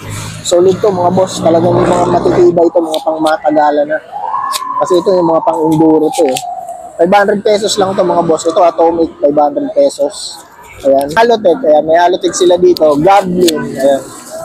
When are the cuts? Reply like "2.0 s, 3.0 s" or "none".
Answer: 11.2 s